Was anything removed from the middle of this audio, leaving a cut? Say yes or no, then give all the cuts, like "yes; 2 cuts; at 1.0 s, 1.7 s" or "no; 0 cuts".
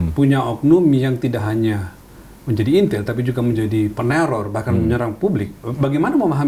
no; 0 cuts